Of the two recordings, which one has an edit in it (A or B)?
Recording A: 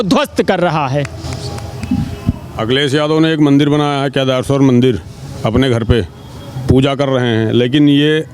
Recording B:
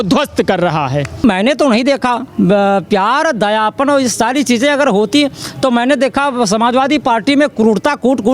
B